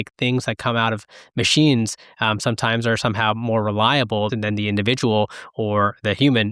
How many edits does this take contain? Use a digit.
1